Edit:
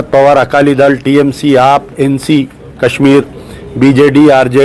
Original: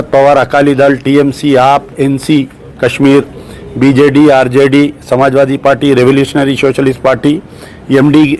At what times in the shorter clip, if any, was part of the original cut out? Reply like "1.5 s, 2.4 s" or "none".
none

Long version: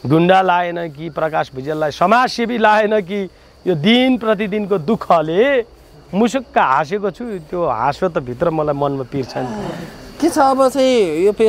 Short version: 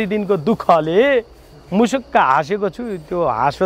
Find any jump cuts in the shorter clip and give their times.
none

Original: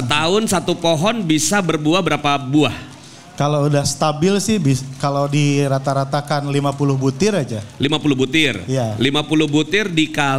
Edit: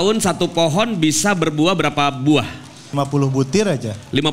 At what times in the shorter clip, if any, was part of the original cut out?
3.0 s

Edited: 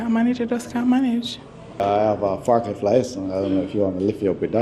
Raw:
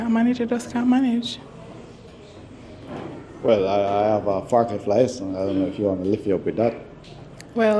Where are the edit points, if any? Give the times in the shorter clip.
1.8 s

